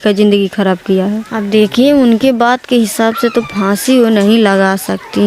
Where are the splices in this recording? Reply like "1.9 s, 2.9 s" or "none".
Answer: 1.3 s